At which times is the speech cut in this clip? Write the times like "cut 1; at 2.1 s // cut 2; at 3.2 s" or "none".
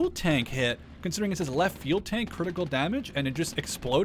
none